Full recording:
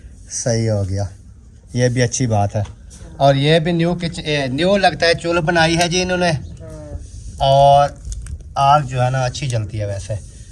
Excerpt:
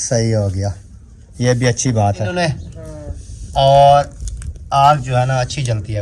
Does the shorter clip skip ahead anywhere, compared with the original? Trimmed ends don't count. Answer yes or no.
yes